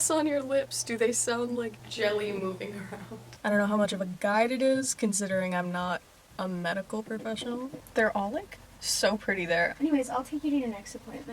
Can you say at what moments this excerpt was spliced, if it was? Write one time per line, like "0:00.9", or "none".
0:03.3
0:07.8

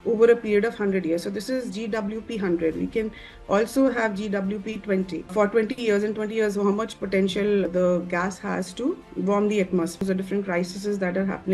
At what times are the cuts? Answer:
0:10.0

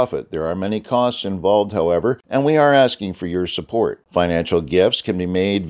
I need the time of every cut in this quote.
0:02.2

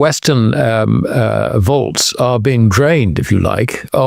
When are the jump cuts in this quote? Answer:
none

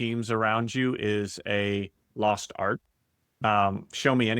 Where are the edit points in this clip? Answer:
0:03.4

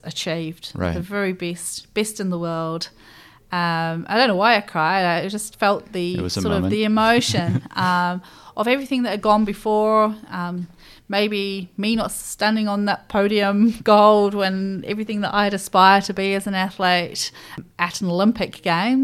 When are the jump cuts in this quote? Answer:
0:17.6

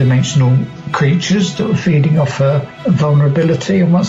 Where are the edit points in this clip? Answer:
0:02.7

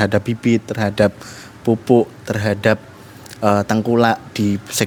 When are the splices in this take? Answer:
none

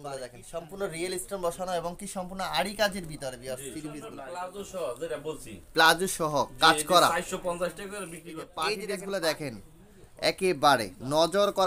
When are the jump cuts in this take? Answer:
0:04.1
0:08.6

